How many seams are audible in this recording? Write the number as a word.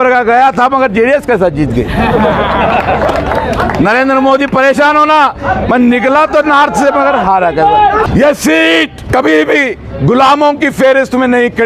two